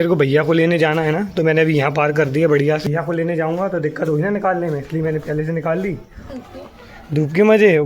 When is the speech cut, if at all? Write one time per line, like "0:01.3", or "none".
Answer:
0:02.9
0:06.3